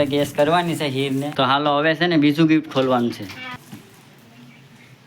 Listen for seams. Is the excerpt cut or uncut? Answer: cut